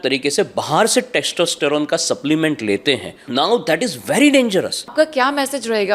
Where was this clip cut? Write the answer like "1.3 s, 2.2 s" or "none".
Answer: 3.1 s, 4.9 s